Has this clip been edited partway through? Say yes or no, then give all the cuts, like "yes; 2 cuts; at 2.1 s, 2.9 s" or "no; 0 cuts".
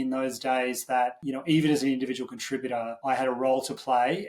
yes; 2 cuts; at 1.2 s, 2.9 s